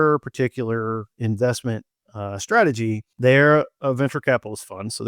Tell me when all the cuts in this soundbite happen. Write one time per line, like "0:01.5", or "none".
0:03.1